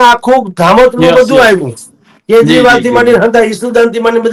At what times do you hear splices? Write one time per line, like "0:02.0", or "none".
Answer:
none